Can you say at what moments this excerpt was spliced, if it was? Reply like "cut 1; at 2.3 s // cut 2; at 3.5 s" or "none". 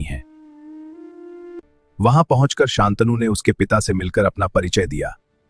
cut 1; at 1.7 s